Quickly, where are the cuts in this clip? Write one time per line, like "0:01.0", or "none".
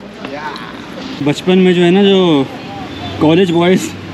0:01.2